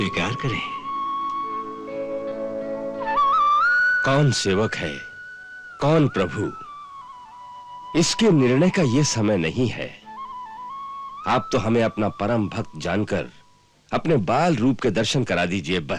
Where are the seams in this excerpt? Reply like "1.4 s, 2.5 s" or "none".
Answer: none